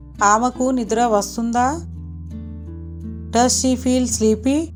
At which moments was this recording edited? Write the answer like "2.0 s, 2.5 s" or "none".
none

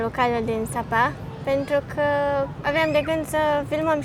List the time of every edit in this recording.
none

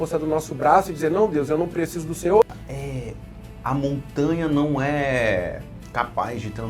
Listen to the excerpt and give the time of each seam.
2.4 s

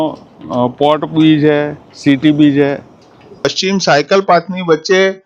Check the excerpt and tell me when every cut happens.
3.5 s

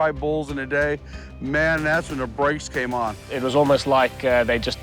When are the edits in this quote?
3.2 s

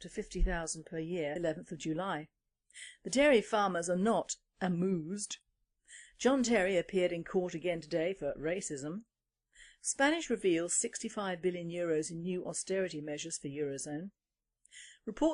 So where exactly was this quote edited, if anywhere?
none

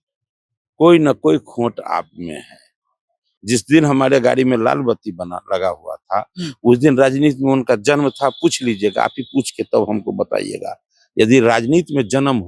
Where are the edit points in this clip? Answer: 3.2 s

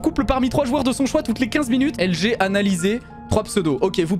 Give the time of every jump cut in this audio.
1.9 s

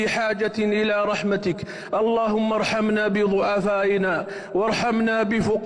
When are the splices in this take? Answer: none

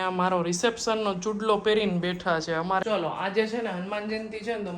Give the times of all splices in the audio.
2.8 s

